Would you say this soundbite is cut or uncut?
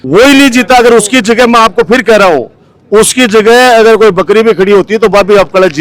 uncut